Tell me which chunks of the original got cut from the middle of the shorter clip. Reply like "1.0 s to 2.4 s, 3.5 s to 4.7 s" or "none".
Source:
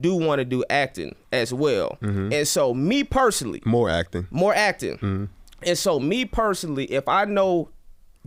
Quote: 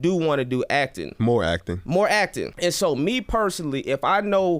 1.0 s to 3.5 s, 4.9 s to 5.5 s